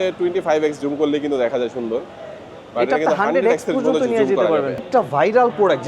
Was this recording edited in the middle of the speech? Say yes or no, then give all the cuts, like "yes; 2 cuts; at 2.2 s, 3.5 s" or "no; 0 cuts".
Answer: yes; 1 cut; at 4.8 s